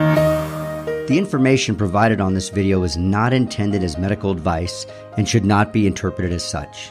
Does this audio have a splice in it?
yes; 1 cut; at 1.0 s

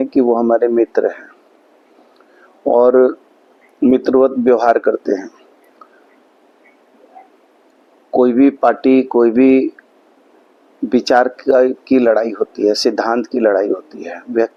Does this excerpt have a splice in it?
no; 0 cuts

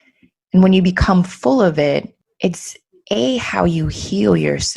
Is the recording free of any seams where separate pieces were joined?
no; 1 cut; at 2.2 s

